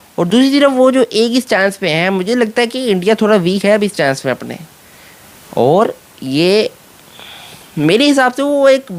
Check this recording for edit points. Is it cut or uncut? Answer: uncut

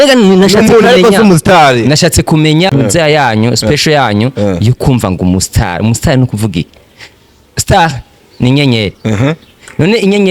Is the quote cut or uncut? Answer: cut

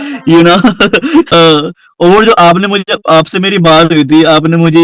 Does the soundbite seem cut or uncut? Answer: cut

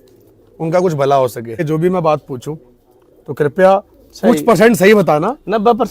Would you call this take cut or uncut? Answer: cut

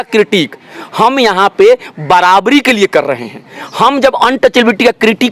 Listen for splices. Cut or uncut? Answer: uncut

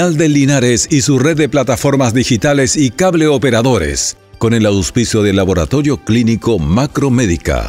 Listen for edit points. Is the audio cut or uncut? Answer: uncut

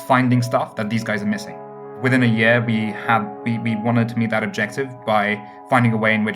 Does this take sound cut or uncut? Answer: cut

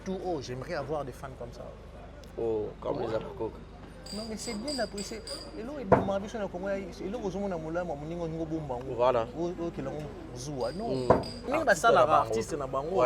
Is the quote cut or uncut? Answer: cut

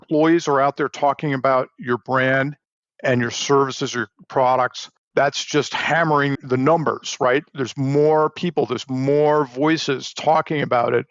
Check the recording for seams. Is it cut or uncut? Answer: cut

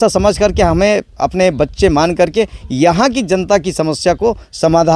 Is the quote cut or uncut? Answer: uncut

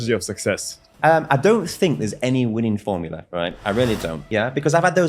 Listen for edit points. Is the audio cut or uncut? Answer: cut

